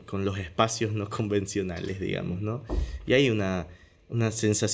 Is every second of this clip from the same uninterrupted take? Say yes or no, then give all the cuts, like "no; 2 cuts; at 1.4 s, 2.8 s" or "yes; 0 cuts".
yes; 0 cuts